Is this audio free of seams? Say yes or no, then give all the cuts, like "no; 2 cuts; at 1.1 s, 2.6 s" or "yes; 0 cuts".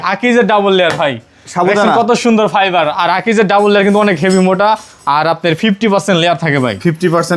yes; 0 cuts